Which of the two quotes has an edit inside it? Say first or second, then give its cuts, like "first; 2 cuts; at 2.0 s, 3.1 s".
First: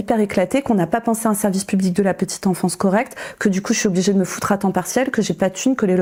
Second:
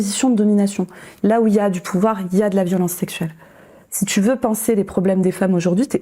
second; 1 cut; at 1.0 s